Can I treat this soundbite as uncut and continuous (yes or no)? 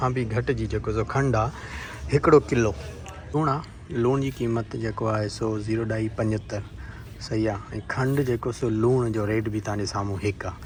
yes